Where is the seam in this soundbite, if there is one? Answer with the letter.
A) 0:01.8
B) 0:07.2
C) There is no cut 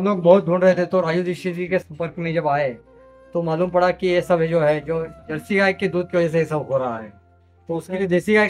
A